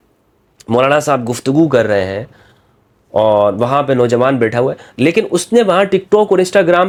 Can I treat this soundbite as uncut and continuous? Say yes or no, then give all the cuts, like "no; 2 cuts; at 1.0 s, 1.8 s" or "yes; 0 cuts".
yes; 0 cuts